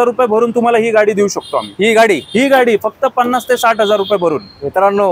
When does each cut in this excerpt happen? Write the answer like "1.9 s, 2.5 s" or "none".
none

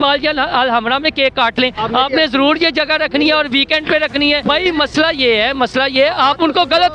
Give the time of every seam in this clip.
4.4 s

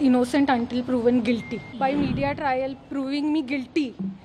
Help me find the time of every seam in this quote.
1.7 s

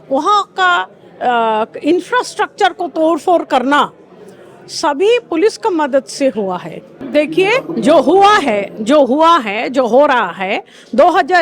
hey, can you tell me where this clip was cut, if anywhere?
7.0 s

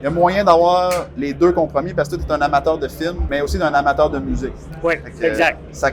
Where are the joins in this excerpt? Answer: 3.2 s

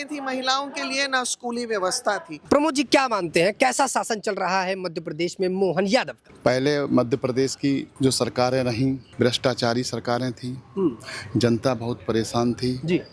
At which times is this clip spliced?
2.3 s, 6.2 s, 7.9 s, 9.1 s

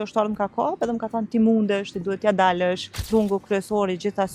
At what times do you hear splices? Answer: 2.9 s

